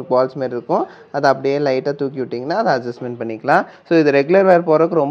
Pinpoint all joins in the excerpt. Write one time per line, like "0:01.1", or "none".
none